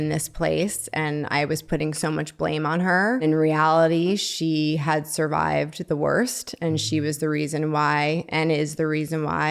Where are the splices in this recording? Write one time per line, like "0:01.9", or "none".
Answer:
0:03.2